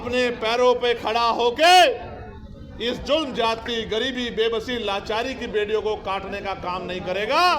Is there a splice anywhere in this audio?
no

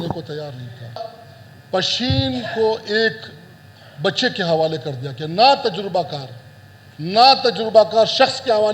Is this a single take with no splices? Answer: no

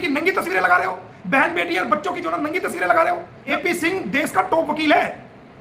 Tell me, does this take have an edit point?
yes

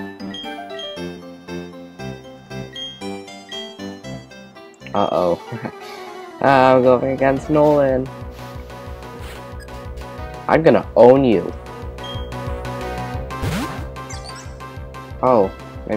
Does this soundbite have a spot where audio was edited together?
yes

